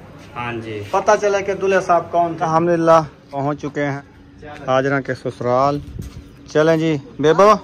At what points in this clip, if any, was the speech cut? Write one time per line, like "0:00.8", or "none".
0:02.4
0:03.4
0:04.1